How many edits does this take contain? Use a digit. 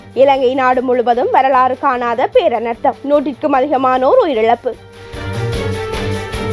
1